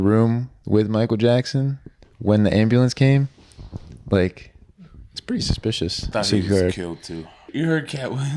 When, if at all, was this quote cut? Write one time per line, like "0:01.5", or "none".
0:06.1
0:07.4